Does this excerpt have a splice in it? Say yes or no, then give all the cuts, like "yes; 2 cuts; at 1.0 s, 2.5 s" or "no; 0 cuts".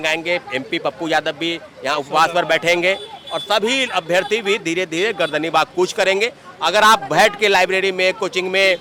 no; 0 cuts